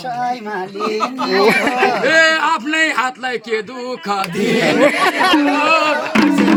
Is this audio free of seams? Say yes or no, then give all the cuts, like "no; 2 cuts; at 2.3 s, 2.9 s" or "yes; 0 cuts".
yes; 0 cuts